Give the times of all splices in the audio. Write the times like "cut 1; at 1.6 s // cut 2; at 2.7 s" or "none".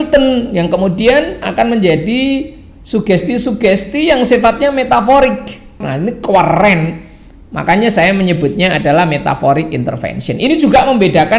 cut 1; at 1.5 s // cut 2; at 5.9 s